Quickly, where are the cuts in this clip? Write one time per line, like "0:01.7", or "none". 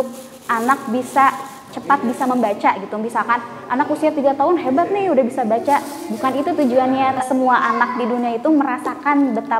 0:07.2